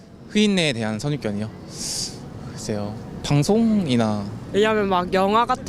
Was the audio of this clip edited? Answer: yes; 1 cut; at 4.4 s

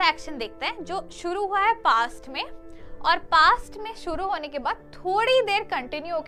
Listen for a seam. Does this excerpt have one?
no; 0 cuts

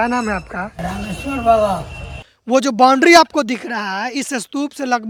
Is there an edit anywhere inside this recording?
no; 0 cuts

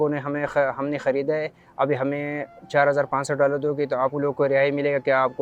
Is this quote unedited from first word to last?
yes; 0 cuts

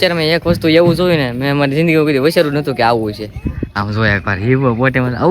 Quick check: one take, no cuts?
yes; 0 cuts

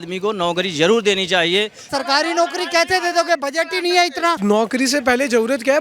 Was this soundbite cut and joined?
yes; 2 cuts; at 1.9 s, 4.4 s

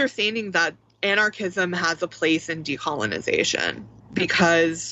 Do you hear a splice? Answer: no; 0 cuts

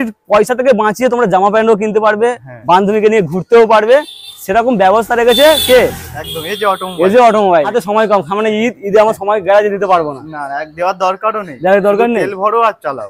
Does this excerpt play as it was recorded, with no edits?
no; 1 cut; at 7.7 s

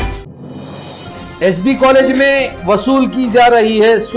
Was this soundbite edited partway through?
yes; 1 cut; at 1.2 s

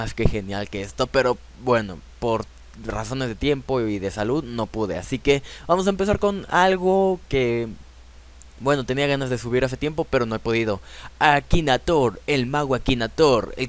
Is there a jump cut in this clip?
no; 0 cuts

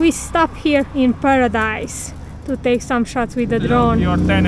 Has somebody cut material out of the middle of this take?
no; 0 cuts

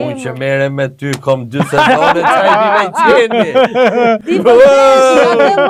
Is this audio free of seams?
yes; 0 cuts

